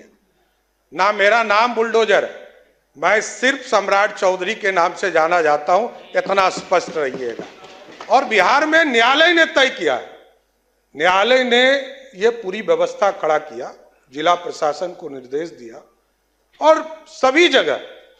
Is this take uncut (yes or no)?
yes